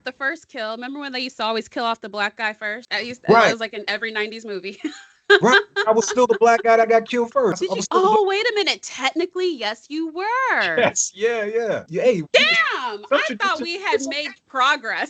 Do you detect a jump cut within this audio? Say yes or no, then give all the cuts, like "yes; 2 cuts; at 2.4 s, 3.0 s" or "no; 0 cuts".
yes; 3 cuts; at 2.8 s, 7.6 s, 11.8 s